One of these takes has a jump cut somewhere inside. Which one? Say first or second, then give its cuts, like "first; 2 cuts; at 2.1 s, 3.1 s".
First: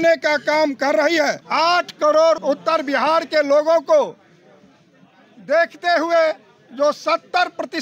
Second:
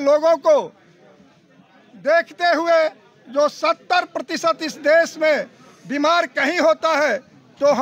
first; 2 cuts; at 1.4 s, 2.4 s